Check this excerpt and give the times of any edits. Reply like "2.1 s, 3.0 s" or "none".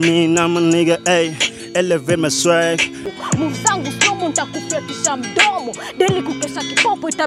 3.1 s